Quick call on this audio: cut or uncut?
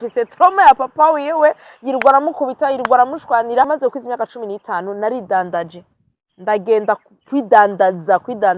cut